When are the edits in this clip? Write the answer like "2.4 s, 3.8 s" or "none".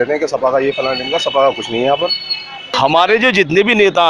2.7 s

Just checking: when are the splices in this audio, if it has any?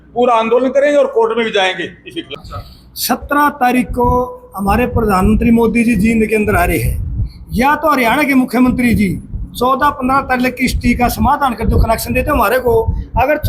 2.3 s

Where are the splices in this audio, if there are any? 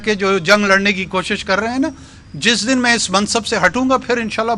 none

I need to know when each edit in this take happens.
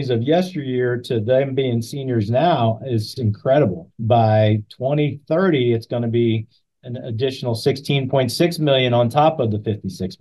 3.1 s, 3.9 s

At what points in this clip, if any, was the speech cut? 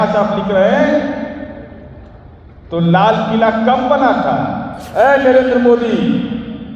4.7 s

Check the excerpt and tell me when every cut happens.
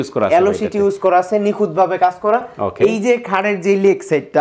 none

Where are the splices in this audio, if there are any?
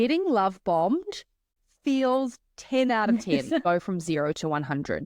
1.6 s, 3.6 s

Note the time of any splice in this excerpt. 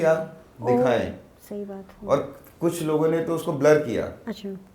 none

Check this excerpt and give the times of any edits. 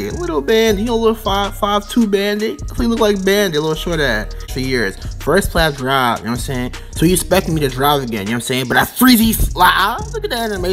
4.5 s

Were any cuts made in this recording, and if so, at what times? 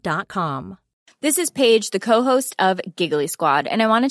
1.1 s

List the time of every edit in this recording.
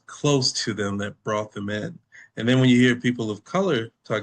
none

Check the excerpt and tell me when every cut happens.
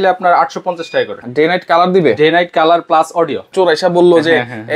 1.2 s, 3.5 s

